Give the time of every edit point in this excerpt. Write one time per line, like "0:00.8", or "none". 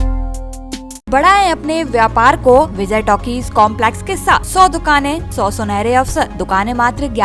0:01.1
0:02.8
0:04.5
0:05.3
0:06.4